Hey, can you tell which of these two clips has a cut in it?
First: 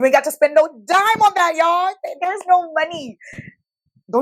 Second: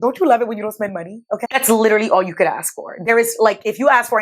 second; 1 cut; at 1.4 s

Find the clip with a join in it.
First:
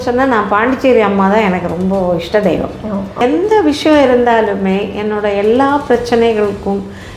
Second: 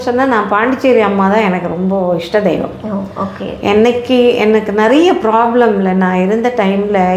first; 1 cut; at 3.2 s

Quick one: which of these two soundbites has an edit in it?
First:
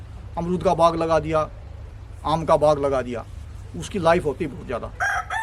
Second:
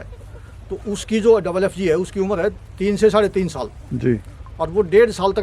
second; 1 cut; at 2.7 s

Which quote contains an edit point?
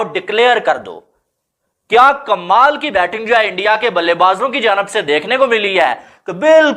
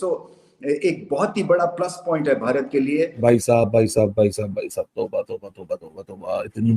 second; 1 cut; at 3.1 s

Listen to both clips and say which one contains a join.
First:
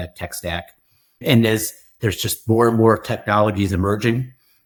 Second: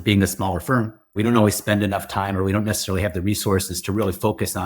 second; 1 cut; at 1.1 s

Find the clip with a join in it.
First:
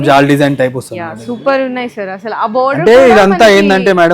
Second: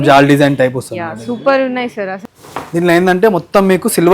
second; 1 cut; at 2.2 s

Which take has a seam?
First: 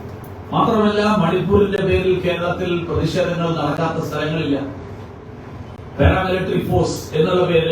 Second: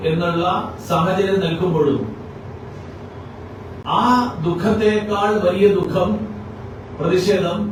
first; 1 cut; at 5.2 s

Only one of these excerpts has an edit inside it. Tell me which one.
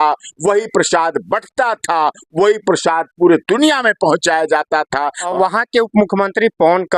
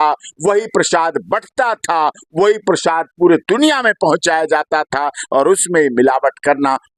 first; 1 cut; at 5.3 s

